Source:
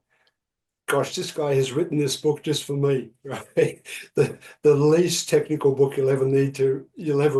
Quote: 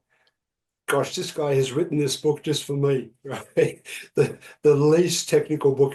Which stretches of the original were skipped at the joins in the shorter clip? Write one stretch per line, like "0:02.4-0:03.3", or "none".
none